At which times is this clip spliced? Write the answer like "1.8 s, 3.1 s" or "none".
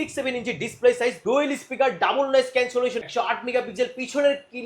1.2 s, 3.0 s